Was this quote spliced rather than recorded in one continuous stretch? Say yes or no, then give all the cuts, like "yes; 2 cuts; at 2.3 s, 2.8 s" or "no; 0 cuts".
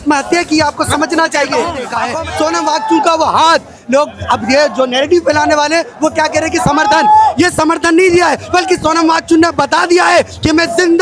yes; 1 cut; at 2.0 s